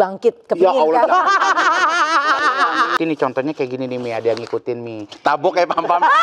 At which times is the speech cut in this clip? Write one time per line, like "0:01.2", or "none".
0:03.0